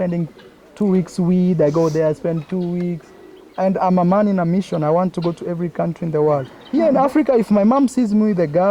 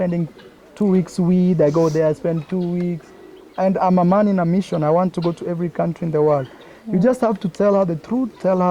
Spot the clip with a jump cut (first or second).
first